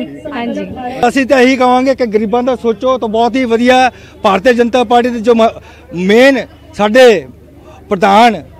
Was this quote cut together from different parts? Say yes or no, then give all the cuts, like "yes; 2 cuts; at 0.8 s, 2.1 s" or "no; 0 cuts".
yes; 1 cut; at 1.0 s